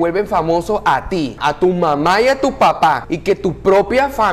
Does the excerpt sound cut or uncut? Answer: cut